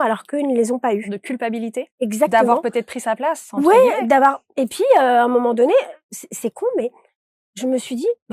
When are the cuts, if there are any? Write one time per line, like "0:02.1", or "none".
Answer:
0:01.1